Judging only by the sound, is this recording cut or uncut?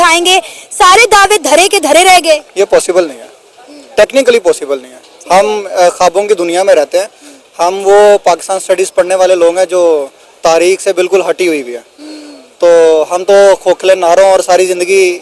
uncut